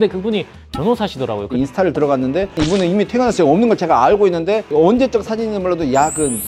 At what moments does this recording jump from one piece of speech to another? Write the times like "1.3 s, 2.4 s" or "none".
1.5 s